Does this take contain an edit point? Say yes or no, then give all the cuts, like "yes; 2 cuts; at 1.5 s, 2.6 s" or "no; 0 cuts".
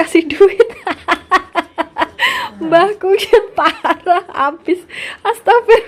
no; 0 cuts